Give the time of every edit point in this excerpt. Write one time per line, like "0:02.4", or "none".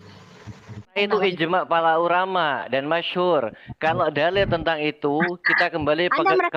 0:01.0